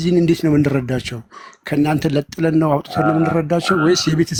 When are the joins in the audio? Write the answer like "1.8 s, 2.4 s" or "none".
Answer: none